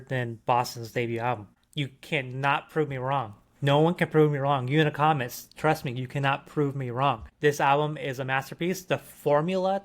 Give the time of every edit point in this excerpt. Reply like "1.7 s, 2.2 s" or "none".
1.6 s, 7.3 s